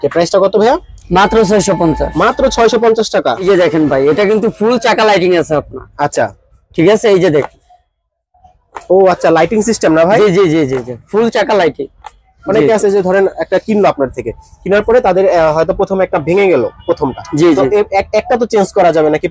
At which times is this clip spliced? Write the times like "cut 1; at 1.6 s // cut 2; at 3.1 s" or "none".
cut 1; at 3.3 s // cut 2; at 12.3 s